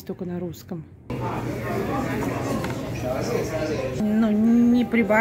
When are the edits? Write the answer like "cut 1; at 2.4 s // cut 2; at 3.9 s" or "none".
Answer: cut 1; at 1.1 s // cut 2; at 4.0 s